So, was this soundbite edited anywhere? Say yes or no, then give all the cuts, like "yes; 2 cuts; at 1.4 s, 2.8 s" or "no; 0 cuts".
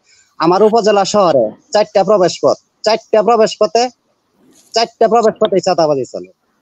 no; 0 cuts